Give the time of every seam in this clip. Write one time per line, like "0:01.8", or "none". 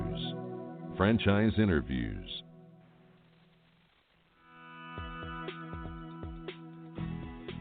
0:04.0